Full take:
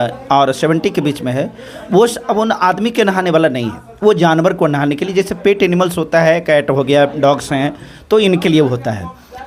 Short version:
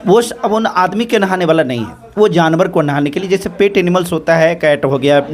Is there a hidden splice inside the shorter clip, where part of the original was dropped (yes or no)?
no